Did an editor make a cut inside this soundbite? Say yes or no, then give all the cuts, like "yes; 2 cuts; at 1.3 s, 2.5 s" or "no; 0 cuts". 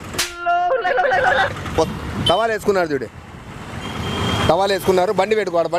yes; 1 cut; at 1.9 s